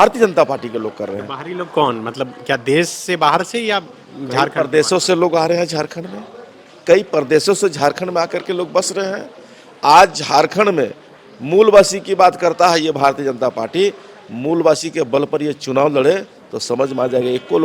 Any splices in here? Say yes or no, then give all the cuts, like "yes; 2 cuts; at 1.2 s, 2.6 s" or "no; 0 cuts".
no; 0 cuts